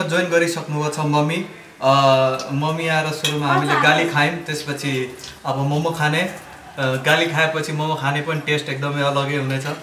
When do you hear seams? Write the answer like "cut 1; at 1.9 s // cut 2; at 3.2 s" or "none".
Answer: none